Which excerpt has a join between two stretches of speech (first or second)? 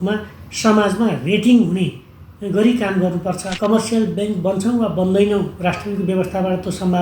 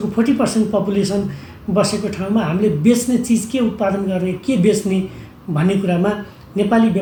first